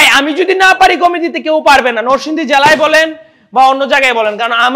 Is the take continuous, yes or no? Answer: yes